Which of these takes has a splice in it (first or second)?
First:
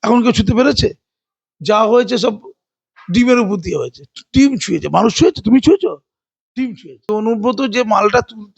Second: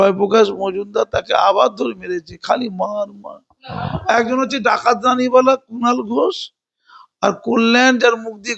first